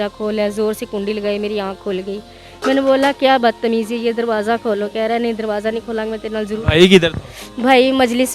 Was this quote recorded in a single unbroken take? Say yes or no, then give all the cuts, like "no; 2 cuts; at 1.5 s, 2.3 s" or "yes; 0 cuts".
yes; 0 cuts